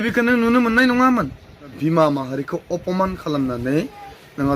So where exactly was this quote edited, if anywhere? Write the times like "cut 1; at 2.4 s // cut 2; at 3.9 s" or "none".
cut 1; at 1.7 s

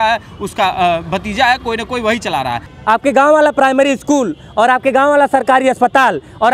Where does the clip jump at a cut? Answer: cut 1; at 2.6 s

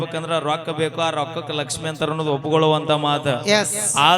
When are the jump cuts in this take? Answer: none

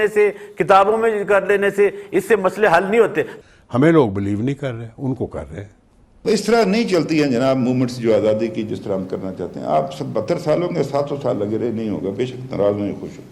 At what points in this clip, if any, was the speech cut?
cut 1; at 3.4 s // cut 2; at 6.2 s

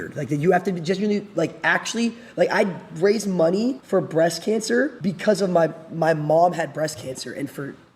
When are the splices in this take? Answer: cut 1; at 3.8 s // cut 2; at 5.0 s

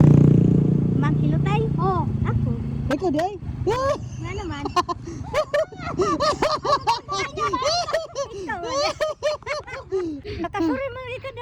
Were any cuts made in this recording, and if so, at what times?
cut 1; at 10.2 s

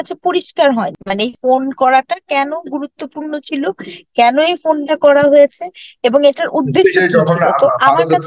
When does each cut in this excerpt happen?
cut 1; at 1.0 s

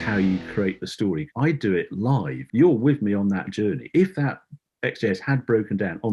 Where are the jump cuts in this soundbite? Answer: cut 1; at 1.2 s // cut 2; at 2.4 s

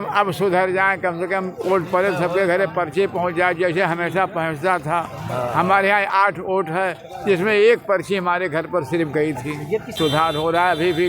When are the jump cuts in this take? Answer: cut 1; at 9.9 s

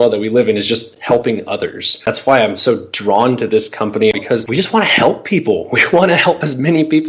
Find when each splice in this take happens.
cut 1; at 2.1 s // cut 2; at 4.2 s

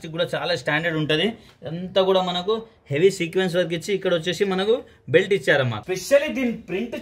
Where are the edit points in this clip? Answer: cut 1; at 1.5 s // cut 2; at 5.8 s

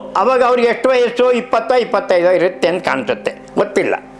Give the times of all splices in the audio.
none

